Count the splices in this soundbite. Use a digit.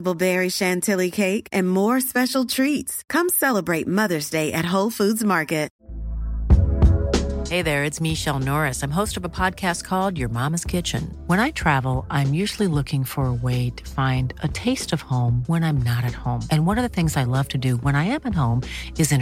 1